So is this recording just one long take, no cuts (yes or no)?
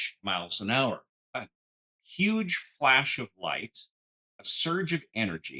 no